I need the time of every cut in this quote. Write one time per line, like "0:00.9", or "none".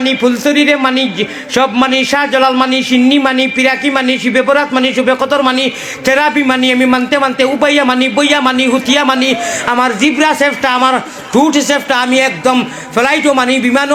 none